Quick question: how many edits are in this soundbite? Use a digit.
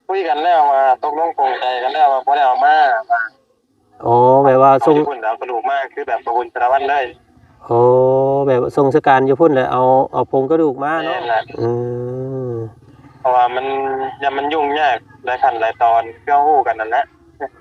1